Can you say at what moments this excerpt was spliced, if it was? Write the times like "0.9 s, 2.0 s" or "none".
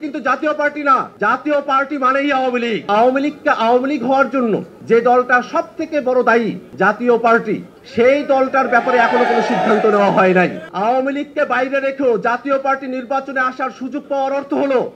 1.1 s, 2.9 s, 4.7 s, 6.6 s, 7.8 s, 10.6 s

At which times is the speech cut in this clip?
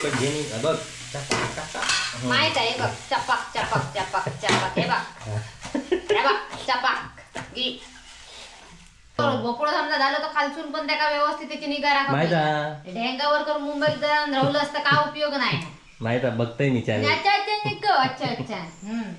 9.2 s

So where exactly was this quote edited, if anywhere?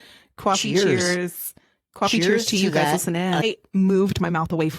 3.4 s

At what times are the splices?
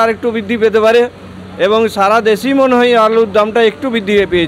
none

